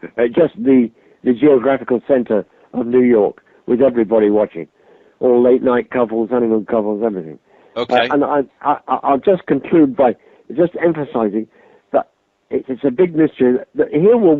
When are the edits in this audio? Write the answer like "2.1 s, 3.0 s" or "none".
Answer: none

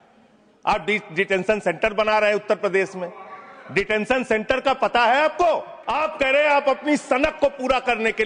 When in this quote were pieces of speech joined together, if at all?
5.8 s

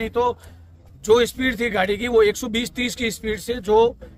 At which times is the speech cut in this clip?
none

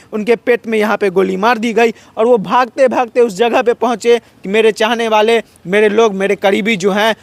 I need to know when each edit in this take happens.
none

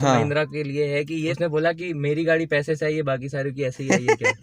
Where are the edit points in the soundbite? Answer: 1.3 s

